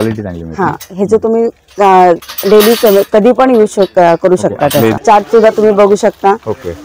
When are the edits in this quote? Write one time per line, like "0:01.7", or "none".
0:05.0